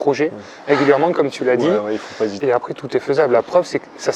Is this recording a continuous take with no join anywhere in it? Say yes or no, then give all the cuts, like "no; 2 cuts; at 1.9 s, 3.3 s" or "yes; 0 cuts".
no; 1 cut; at 2.4 s